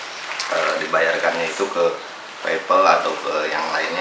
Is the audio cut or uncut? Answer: uncut